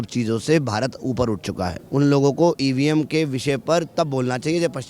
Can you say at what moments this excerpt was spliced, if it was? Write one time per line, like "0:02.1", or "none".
0:01.8